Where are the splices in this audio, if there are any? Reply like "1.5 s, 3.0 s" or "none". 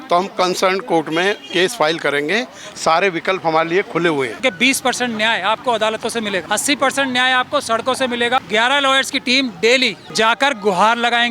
4.4 s, 6.4 s, 8.4 s, 10.0 s